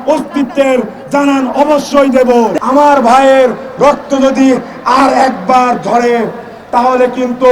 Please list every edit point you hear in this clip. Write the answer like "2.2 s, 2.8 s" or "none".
2.5 s

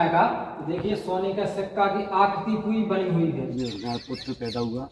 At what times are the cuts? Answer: 3.5 s

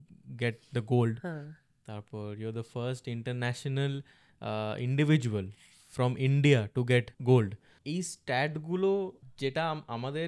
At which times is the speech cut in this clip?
7.1 s, 7.7 s, 9.2 s

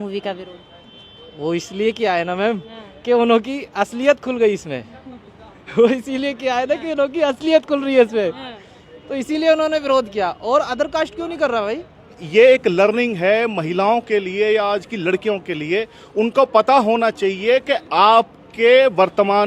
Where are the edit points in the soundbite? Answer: 12.2 s

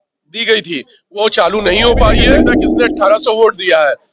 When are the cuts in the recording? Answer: 2.6 s

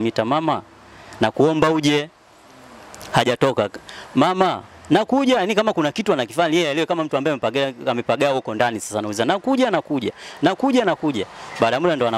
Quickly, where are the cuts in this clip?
none

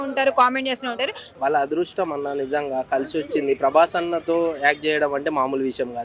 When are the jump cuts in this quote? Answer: 1.3 s

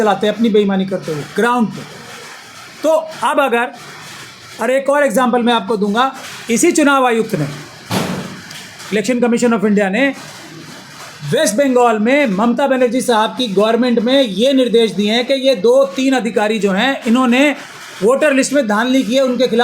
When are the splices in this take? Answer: none

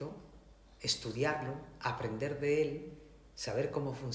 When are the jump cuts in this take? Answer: none

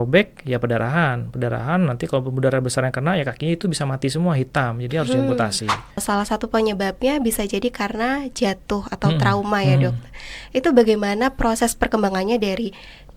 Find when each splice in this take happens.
6.0 s

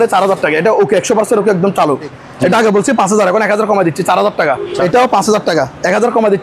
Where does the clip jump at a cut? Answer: 2.2 s, 4.7 s

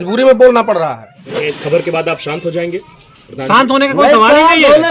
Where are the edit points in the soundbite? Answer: 1.4 s

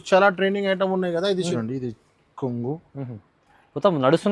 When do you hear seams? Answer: 1.6 s

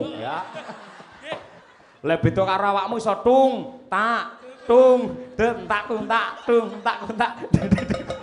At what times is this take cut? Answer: 1.6 s

